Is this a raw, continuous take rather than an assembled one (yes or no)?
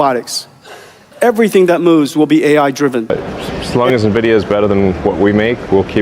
no